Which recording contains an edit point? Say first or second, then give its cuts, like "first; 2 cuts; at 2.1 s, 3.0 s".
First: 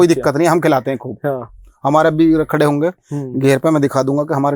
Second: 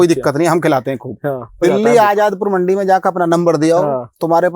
second; 1 cut; at 1.6 s